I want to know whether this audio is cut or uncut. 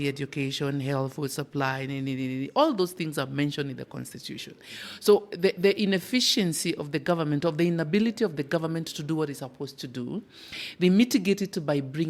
uncut